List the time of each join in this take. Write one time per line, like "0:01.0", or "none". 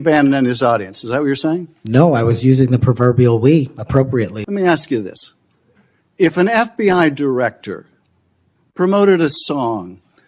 0:04.4